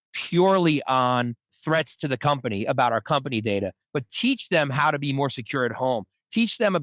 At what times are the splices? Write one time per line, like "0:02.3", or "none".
0:01.5